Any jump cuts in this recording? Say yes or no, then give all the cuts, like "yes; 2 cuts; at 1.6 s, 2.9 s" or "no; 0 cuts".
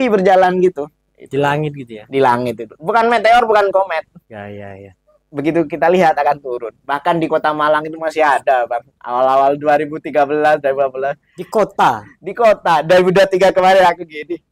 no; 0 cuts